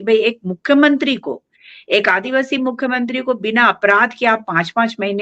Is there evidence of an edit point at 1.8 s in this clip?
no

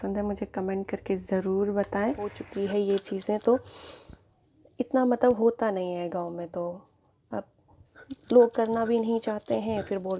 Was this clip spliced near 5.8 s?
no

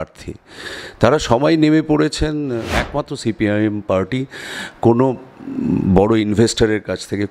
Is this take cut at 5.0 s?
no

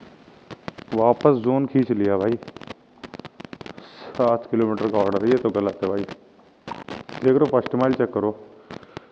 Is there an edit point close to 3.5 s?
no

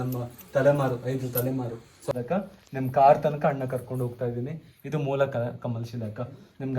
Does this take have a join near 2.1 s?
yes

